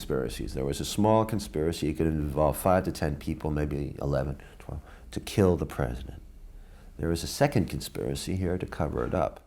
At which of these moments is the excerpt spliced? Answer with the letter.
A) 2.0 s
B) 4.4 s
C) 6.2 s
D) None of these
D